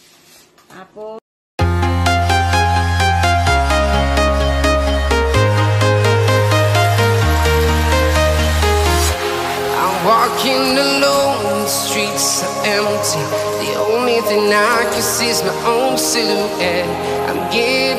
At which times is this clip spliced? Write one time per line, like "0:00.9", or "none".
0:01.6